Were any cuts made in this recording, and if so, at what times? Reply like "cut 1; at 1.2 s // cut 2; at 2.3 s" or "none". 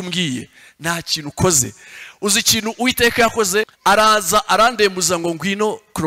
cut 1; at 3.7 s